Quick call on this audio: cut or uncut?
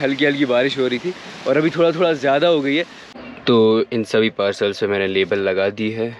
cut